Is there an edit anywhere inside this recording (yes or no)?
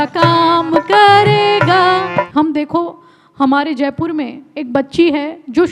yes